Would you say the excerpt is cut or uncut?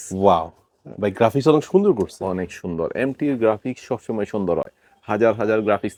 uncut